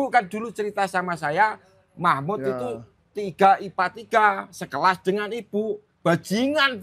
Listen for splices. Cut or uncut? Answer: uncut